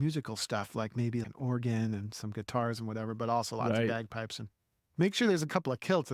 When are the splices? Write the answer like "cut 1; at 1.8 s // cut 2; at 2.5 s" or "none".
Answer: cut 1; at 1.3 s